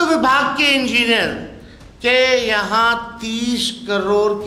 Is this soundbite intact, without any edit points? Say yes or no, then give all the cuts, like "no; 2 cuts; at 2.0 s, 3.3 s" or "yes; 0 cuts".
yes; 0 cuts